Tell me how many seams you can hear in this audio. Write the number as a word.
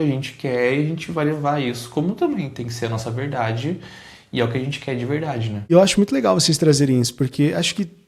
zero